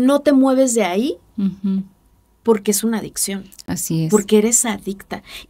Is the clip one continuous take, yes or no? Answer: yes